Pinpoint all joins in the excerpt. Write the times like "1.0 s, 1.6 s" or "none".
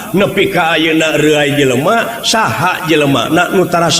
none